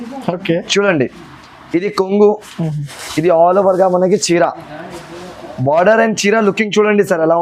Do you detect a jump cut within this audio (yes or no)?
no